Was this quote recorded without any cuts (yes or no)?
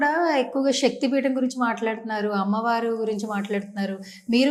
yes